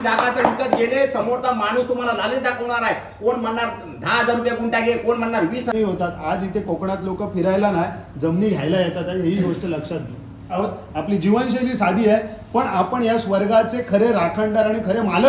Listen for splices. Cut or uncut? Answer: cut